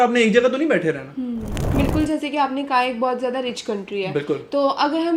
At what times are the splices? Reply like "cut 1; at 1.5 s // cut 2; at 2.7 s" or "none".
cut 1; at 1.6 s